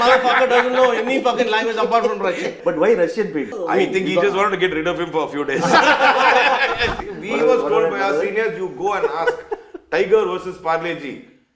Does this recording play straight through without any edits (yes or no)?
no